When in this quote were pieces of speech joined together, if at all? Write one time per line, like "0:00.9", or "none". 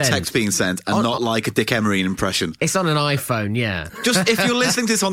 0:03.8